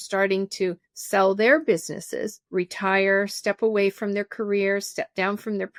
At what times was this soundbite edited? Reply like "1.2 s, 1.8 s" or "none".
none